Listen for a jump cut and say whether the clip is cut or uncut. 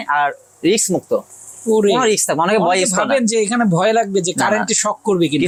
uncut